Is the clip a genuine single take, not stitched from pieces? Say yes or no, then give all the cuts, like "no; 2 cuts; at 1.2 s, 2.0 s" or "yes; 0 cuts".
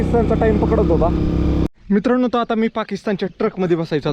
no; 1 cut; at 1.7 s